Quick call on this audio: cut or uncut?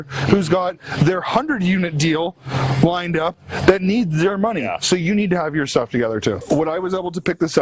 cut